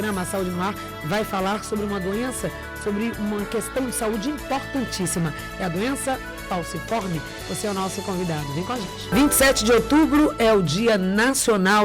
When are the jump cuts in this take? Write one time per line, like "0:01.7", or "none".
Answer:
0:09.1